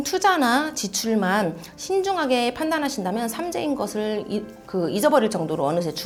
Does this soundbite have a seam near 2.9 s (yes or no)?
no